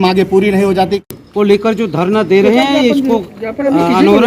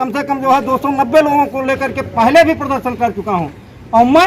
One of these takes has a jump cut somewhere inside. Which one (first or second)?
first